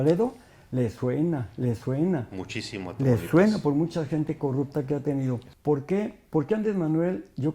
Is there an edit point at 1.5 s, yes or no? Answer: no